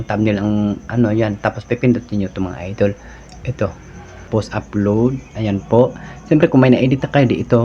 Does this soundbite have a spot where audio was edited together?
yes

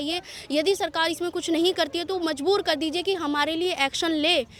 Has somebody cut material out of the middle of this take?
no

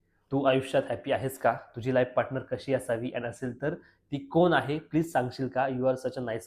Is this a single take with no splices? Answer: yes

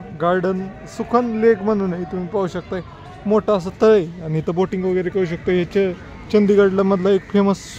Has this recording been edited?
no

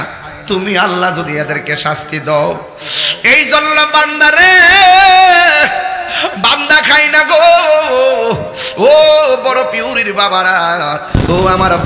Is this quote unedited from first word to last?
yes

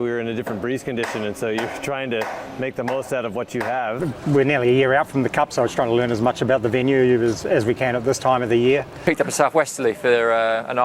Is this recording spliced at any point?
yes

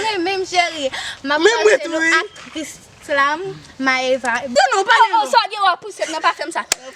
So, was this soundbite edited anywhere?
yes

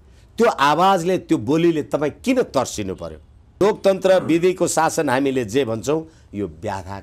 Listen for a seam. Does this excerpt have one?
yes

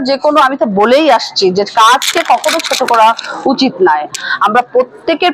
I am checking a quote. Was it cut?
yes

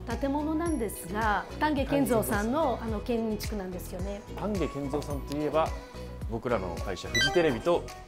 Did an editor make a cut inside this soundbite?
yes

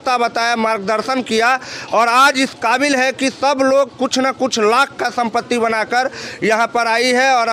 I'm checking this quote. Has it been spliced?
no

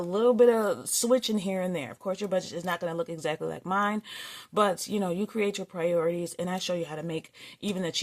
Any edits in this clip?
no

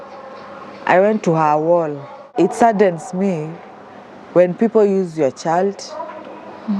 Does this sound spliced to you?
yes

